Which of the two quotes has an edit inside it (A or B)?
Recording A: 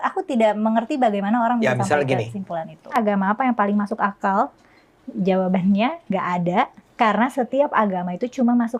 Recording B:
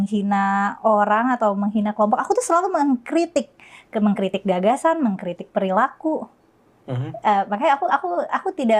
A